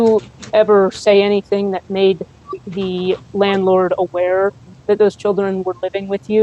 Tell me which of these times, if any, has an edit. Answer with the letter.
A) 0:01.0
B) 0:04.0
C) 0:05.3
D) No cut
D